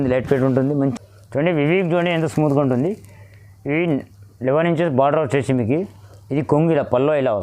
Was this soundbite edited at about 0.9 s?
yes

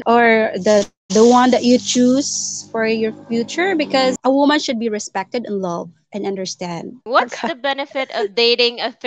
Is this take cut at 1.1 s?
no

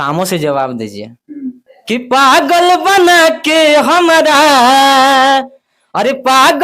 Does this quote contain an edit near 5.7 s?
no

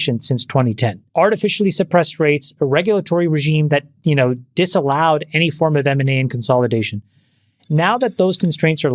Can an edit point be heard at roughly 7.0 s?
no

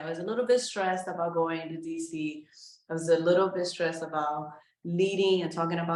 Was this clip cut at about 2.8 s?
no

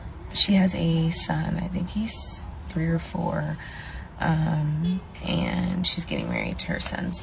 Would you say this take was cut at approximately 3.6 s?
yes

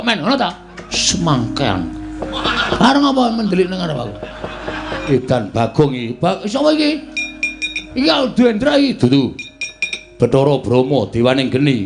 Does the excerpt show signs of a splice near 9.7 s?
no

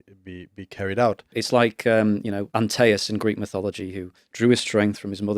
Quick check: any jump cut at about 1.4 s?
yes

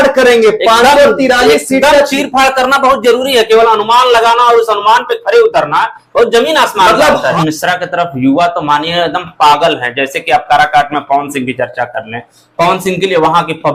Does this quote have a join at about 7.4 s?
yes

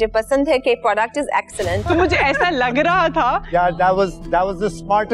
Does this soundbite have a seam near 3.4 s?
no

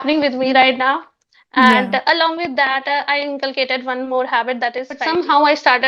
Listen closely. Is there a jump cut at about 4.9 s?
yes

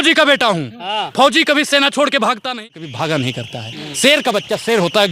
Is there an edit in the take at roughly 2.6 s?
yes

